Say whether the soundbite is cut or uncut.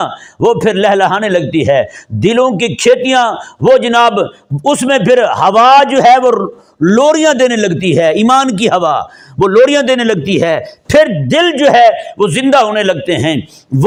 uncut